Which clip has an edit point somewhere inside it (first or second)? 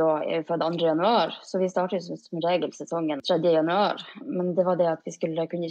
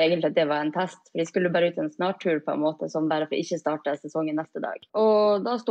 second